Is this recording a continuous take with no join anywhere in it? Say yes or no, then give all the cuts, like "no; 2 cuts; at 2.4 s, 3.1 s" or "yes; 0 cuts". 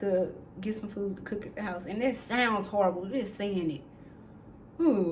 yes; 0 cuts